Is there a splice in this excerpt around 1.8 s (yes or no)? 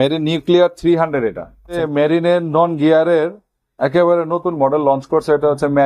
yes